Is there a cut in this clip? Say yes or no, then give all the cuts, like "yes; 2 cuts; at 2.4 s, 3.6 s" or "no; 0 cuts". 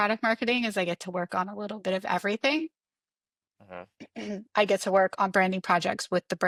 no; 0 cuts